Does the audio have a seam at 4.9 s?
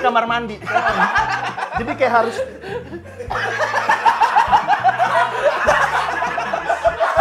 no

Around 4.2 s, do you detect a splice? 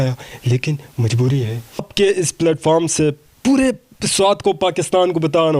no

